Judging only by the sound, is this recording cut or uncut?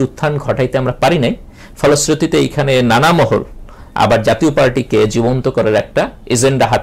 uncut